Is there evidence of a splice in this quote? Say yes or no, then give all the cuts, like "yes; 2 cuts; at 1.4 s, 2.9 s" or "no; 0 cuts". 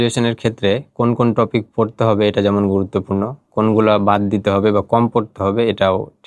no; 0 cuts